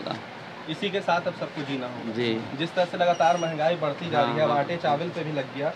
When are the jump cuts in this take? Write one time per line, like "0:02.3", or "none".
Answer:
none